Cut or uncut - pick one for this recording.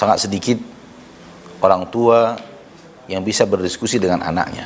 uncut